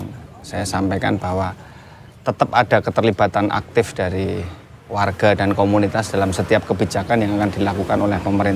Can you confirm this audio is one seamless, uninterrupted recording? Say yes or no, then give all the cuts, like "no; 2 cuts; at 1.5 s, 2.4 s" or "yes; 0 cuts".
yes; 0 cuts